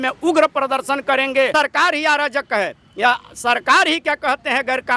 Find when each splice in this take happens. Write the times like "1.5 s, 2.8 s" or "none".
1.5 s